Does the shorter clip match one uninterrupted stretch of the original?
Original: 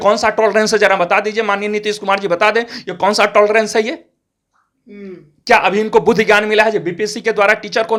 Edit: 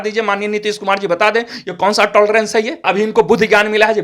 no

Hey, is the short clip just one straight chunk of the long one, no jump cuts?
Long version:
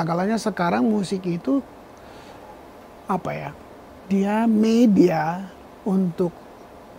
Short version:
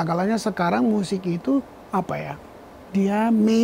no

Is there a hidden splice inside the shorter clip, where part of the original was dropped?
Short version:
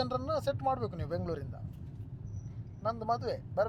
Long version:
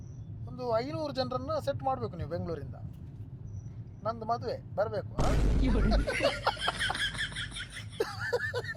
no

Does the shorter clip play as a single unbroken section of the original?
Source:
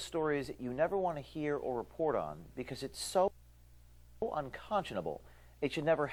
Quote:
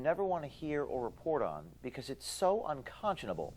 no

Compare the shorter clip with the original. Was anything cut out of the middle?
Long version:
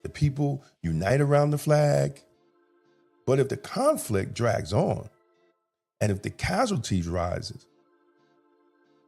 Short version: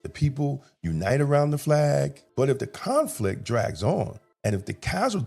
yes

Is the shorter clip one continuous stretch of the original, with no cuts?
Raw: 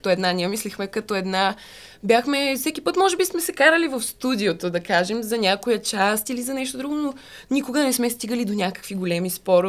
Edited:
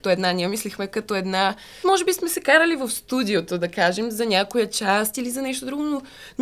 no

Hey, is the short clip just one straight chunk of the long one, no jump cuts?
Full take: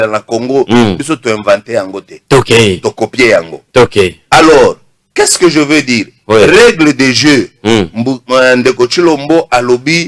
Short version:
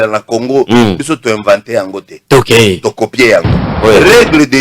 no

